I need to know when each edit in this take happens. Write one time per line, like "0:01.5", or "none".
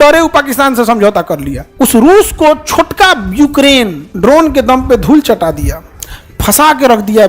0:01.6
0:04.0